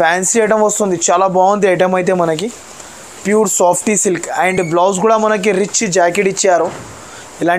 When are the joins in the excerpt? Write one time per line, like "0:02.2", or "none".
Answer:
none